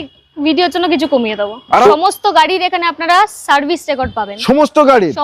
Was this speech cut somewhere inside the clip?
yes; 1 cut; at 1.9 s

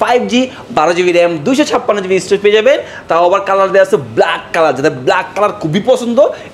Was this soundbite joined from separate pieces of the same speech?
no; 0 cuts

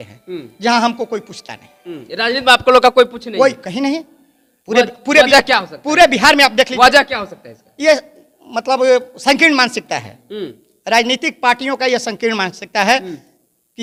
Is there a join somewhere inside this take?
no; 0 cuts

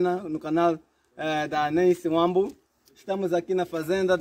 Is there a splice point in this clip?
no; 0 cuts

